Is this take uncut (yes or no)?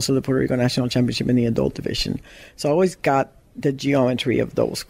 yes